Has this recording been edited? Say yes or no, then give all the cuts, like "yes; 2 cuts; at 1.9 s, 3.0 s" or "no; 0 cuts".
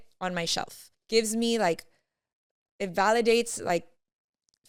no; 0 cuts